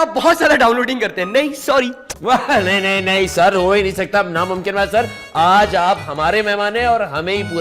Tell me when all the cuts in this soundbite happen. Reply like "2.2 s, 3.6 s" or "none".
2.1 s